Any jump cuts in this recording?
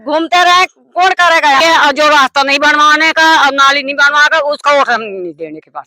yes; 1 cut; at 1.6 s

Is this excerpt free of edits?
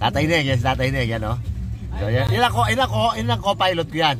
yes; 0 cuts

